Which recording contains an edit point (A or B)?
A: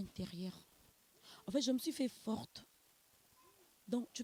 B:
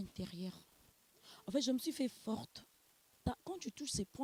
B